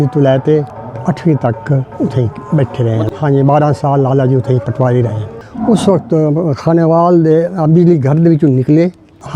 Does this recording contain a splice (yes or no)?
yes